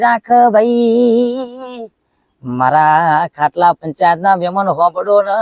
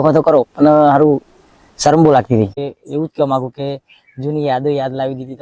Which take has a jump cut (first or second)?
second